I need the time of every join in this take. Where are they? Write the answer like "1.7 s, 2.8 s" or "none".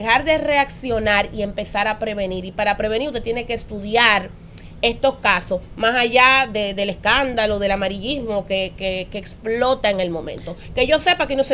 none